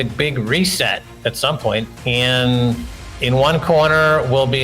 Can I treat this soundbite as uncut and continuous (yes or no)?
no